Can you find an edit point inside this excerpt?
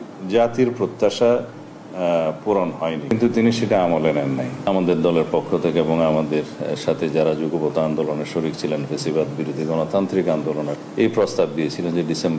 yes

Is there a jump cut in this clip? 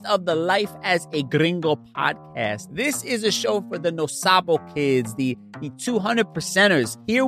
no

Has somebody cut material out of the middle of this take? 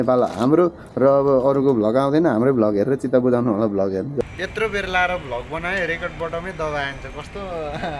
yes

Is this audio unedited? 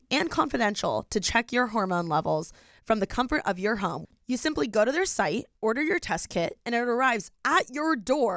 no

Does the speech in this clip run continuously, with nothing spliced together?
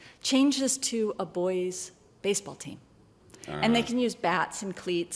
no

